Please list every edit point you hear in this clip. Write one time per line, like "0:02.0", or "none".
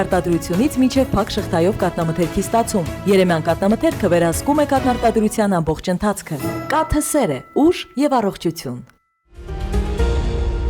0:09.5